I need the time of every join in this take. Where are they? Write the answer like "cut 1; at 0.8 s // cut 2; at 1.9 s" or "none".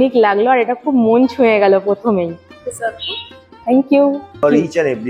cut 1; at 2.5 s // cut 2; at 4.4 s

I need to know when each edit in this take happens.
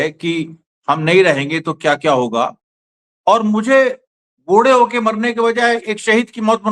none

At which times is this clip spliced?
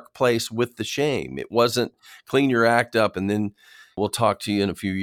cut 1; at 4.0 s

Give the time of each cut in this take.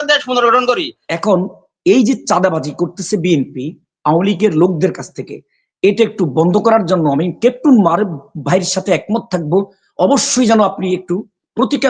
cut 1; at 1.0 s

